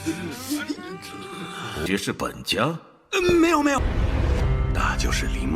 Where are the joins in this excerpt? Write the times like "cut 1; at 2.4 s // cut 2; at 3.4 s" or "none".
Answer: cut 1; at 3.8 s